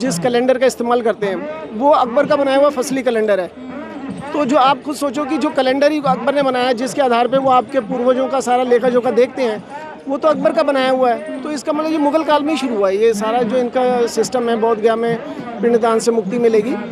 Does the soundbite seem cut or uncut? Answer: uncut